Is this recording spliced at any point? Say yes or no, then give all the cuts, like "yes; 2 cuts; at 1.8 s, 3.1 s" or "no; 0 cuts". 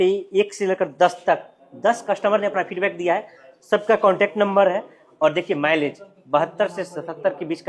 no; 0 cuts